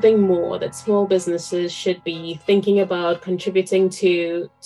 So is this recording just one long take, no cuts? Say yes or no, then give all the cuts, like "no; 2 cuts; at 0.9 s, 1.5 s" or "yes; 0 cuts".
yes; 0 cuts